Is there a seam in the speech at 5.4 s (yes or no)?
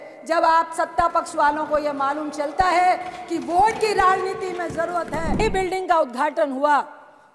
yes